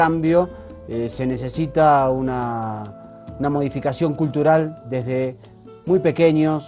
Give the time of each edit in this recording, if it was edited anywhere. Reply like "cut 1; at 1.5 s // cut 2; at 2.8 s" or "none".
cut 1; at 4.0 s